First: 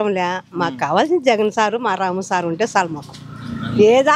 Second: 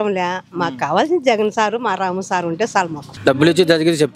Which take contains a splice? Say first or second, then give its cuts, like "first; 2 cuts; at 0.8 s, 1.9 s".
second; 1 cut; at 3.0 s